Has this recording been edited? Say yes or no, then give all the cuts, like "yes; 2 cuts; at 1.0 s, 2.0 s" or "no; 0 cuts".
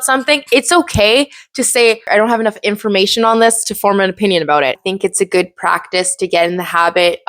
yes; 2 cuts; at 2.1 s, 4.8 s